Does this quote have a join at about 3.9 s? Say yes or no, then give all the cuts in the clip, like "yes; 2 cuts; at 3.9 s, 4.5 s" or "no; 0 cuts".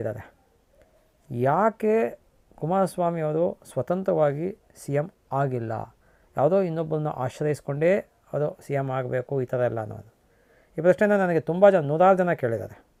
no; 0 cuts